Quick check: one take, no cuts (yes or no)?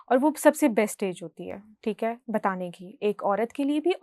yes